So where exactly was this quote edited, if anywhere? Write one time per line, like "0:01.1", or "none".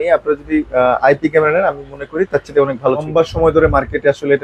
0:03.1